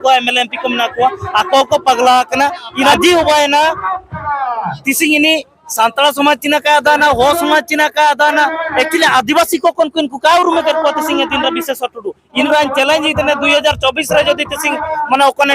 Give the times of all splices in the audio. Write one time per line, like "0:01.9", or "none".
0:02.9
0:12.4